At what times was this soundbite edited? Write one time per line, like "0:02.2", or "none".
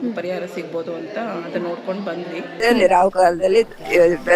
0:02.5